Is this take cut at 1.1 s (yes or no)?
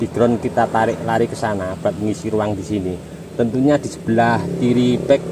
no